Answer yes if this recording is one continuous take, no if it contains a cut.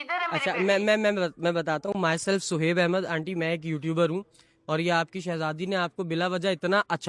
yes